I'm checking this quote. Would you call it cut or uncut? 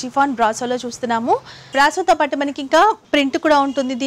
cut